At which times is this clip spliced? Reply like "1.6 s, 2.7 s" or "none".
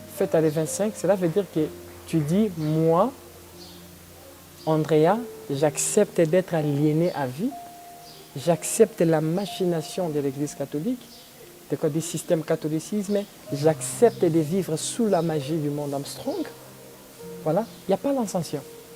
none